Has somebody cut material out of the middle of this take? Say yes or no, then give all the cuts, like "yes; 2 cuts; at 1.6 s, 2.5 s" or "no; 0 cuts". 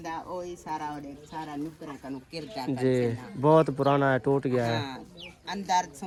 no; 0 cuts